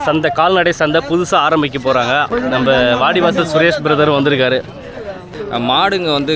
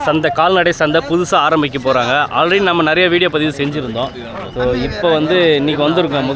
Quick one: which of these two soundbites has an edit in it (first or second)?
first